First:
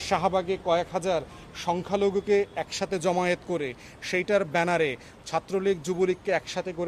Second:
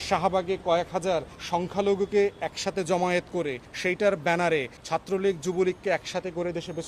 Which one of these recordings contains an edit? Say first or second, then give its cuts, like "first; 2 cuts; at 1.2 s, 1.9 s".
second; 3 cuts; at 1.4 s, 3.7 s, 4.7 s